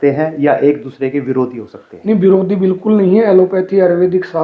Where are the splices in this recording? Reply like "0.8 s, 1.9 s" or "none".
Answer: none